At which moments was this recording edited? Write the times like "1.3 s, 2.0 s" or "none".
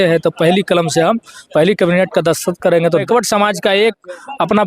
3.0 s